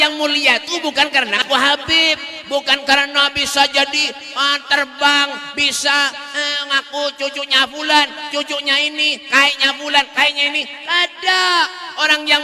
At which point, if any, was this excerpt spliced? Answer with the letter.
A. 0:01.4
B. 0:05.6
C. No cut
A